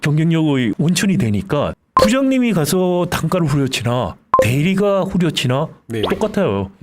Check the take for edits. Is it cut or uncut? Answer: cut